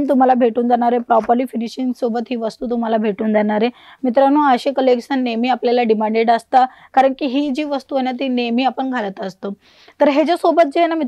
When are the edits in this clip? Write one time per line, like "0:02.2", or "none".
none